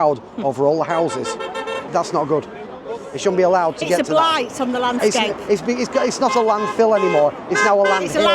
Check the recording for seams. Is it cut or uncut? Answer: cut